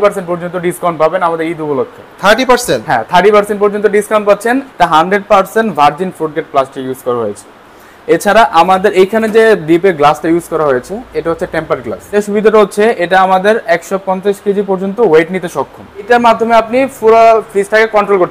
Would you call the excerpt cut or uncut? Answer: cut